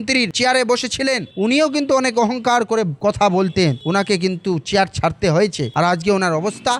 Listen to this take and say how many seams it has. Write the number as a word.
zero